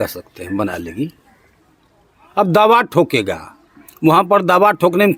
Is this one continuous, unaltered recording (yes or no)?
yes